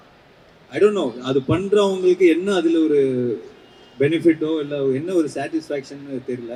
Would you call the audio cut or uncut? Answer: uncut